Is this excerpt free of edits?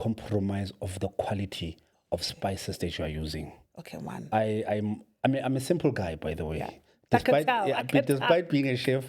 yes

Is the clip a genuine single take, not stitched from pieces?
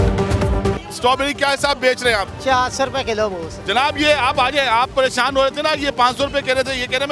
no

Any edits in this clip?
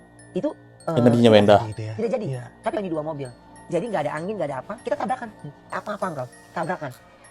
yes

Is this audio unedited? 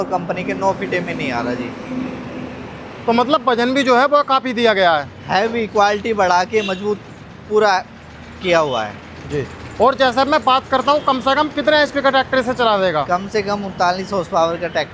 yes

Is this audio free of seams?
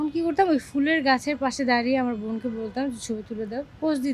yes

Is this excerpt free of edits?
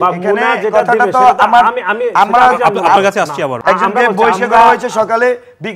no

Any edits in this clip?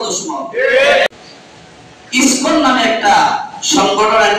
yes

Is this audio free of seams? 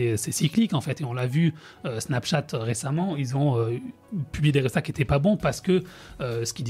no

